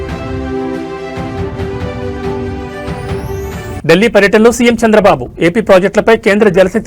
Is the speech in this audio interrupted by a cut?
yes; 1 cut; at 3.8 s

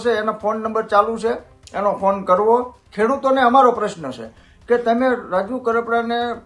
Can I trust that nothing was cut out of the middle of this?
no; 1 cut; at 2.8 s

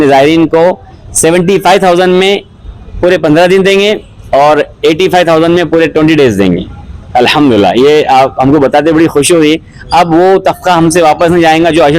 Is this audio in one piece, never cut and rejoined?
yes; 0 cuts

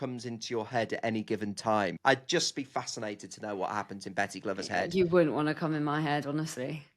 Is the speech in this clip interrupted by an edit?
yes; 1 cut; at 1.9 s

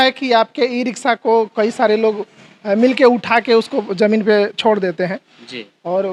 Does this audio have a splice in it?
no; 0 cuts

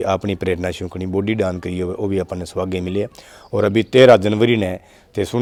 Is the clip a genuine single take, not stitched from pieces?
yes; 0 cuts

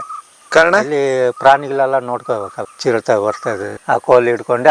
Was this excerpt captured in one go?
no; 2 cuts; at 2.6 s, 3.8 s

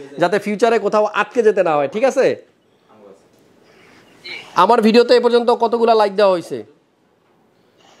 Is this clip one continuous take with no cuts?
yes; 0 cuts

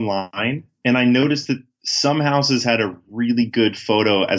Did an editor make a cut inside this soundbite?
no; 0 cuts

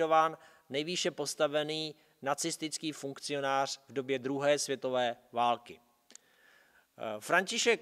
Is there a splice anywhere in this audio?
yes; 1 cut; at 4.6 s

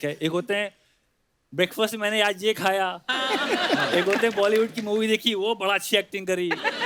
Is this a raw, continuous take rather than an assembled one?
yes; 0 cuts

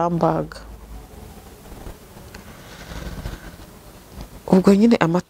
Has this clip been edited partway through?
no; 0 cuts

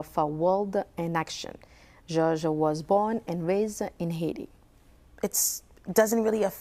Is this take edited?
no; 0 cuts

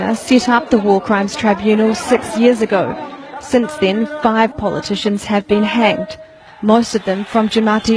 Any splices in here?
no; 0 cuts

